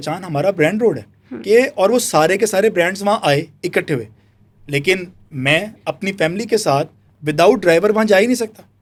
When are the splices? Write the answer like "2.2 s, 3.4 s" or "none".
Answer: none